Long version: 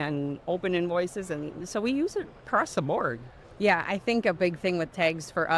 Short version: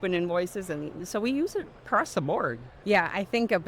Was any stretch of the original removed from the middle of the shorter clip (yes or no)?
yes